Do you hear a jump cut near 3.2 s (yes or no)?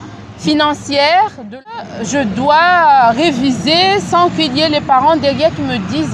no